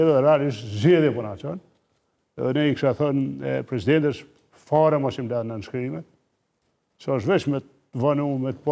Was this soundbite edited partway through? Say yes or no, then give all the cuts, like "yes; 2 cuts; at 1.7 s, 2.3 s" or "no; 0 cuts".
no; 0 cuts